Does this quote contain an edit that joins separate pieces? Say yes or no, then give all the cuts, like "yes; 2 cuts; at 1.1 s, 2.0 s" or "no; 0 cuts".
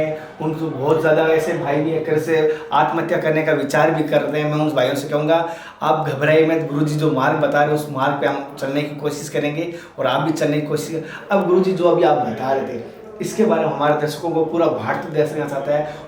no; 0 cuts